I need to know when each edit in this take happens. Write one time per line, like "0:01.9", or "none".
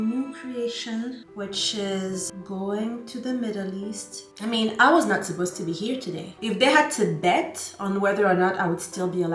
0:04.3

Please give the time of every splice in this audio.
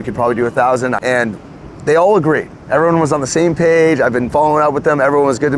0:01.0

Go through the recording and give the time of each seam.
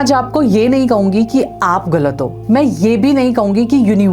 none

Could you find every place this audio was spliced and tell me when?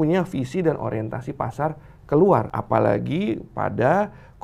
0:02.6

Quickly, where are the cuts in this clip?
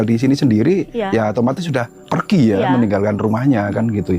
0:02.0

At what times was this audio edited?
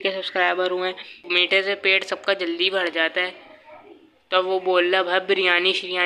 0:01.2

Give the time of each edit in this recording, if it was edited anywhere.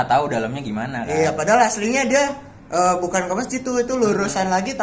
none

